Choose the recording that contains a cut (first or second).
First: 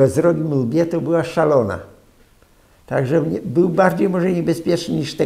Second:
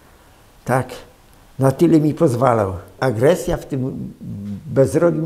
second